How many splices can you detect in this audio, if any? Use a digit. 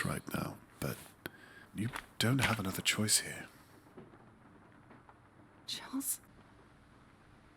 1